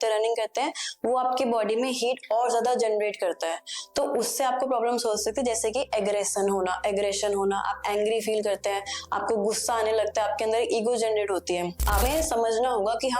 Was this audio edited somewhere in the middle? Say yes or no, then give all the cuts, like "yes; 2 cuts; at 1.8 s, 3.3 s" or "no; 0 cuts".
yes; 1 cut; at 12.0 s